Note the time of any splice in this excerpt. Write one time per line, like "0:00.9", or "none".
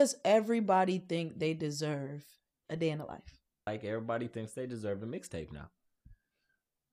0:03.7